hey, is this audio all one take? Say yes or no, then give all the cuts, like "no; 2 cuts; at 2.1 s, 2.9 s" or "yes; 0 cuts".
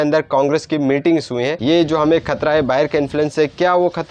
no; 1 cut; at 1.6 s